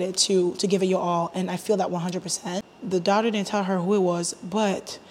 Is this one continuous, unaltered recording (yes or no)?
no